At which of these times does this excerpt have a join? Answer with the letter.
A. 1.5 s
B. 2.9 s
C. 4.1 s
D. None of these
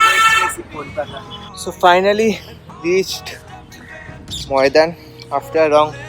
A